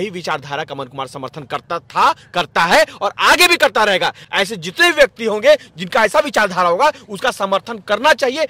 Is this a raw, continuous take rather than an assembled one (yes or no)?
yes